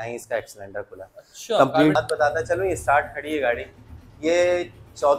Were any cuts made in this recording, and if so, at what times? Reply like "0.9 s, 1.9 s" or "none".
1.9 s